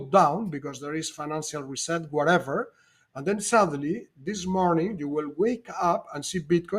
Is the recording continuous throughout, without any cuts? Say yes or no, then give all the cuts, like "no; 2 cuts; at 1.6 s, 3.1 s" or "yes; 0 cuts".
yes; 0 cuts